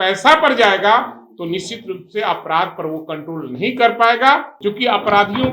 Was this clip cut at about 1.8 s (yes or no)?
no